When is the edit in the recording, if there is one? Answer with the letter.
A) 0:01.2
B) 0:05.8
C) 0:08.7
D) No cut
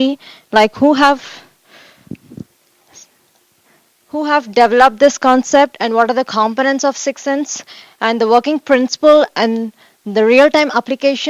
A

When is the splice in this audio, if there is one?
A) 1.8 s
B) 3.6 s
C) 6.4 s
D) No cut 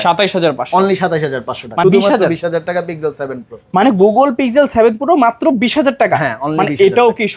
A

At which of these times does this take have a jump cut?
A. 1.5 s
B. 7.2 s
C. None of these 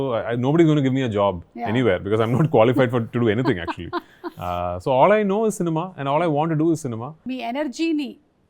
B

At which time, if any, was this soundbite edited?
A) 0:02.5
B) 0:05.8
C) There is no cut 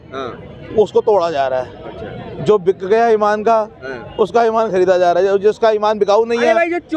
C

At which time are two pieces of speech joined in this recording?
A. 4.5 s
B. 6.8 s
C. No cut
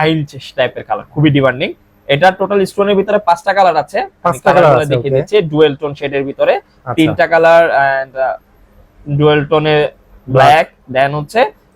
C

